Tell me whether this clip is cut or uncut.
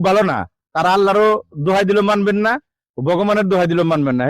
uncut